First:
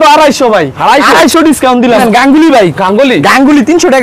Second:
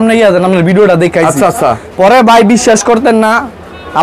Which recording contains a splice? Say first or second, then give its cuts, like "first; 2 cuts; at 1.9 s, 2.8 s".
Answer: first; 1 cut; at 2.0 s